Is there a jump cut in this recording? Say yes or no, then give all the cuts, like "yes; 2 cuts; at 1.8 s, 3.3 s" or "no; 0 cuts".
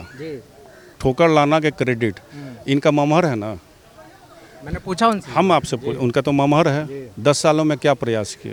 no; 0 cuts